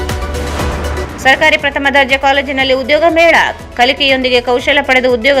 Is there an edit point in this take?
yes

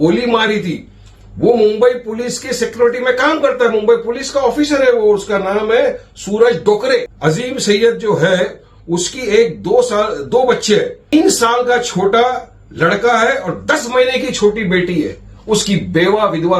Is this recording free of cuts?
no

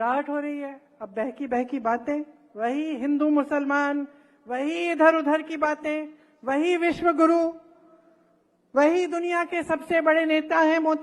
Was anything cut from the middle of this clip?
no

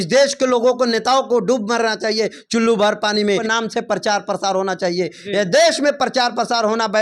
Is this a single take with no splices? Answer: no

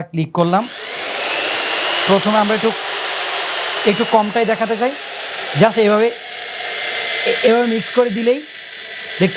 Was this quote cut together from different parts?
no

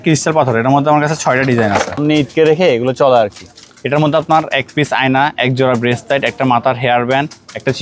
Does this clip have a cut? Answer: yes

